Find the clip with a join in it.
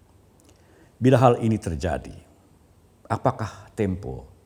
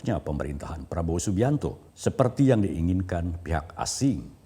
second; 1 cut; at 1.9 s

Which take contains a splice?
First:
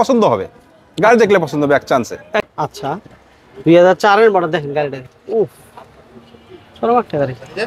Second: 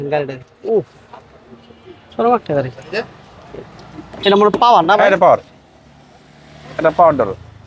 first; 1 cut; at 2.4 s

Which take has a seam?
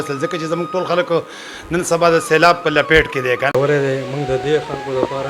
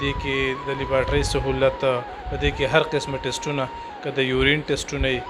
first; 1 cut; at 3.6 s

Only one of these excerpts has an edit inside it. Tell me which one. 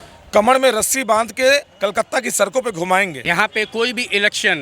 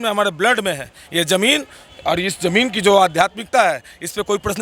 first; 1 cut; at 3.2 s

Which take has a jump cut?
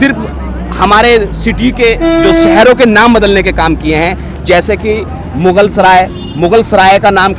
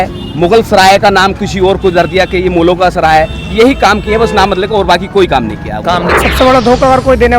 second; 1 cut; at 6.1 s

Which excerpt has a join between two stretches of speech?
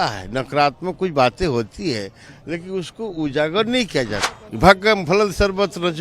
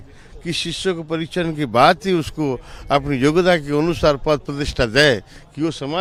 first; 1 cut; at 4.2 s

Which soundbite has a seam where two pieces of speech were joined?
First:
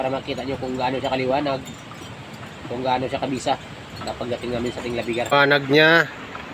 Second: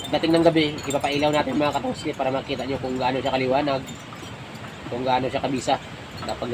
first; 1 cut; at 5.3 s

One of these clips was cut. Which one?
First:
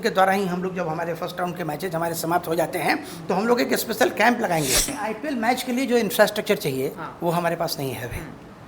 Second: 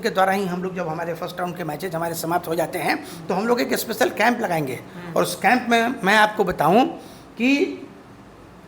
first; 1 cut; at 4.9 s

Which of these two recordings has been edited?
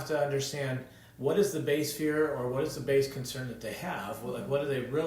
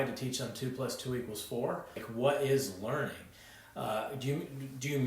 second; 1 cut; at 2.0 s

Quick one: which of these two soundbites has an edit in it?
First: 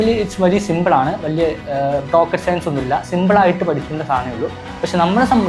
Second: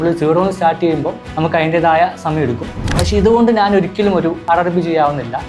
second; 3 cuts; at 1.2 s, 2.8 s, 4.4 s

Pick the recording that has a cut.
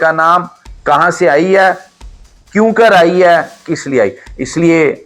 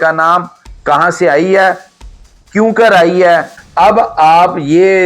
second; 1 cut; at 3.6 s

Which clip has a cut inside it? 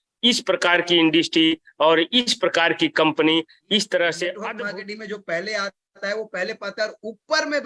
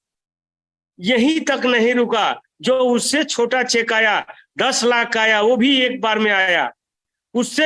first; 1 cut; at 4.5 s

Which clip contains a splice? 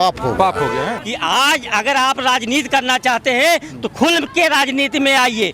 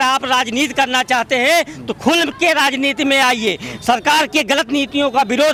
first; 1 cut; at 1.0 s

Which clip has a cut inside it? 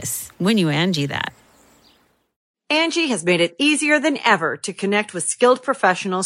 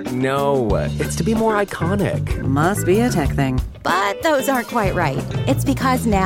first; 1 cut; at 2.3 s

